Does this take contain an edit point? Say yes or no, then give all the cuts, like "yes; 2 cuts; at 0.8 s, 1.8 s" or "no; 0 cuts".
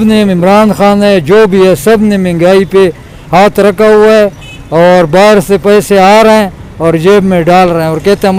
no; 0 cuts